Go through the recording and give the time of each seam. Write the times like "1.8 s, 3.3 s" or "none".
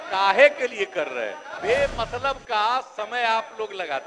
1.5 s

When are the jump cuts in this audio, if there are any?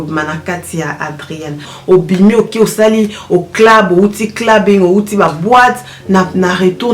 1.7 s

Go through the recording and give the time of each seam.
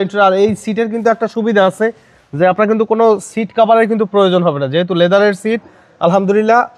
none

